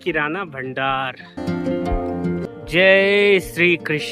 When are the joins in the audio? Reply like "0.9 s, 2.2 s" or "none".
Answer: 1.4 s, 2.5 s